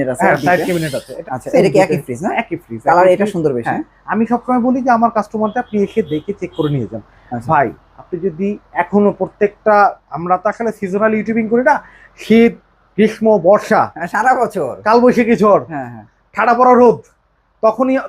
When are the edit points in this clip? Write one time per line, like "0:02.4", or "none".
0:01.1

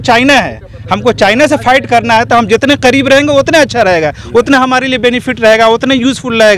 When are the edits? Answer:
none

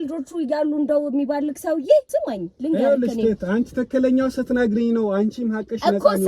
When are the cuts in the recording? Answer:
0:02.1

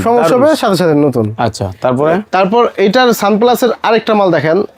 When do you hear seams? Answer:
none

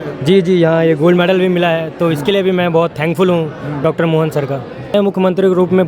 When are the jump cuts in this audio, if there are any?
0:04.9

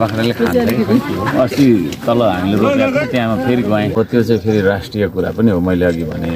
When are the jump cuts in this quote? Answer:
0:04.0

